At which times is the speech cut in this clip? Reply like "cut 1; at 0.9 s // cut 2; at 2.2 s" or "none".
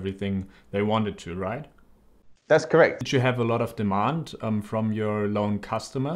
cut 1; at 3.0 s